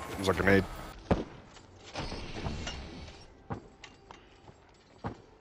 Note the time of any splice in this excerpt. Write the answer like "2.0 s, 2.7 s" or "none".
0.9 s